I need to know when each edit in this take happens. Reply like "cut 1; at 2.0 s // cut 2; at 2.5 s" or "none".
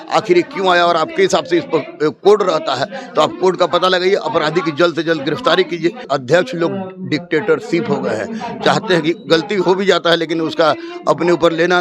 cut 1; at 6.1 s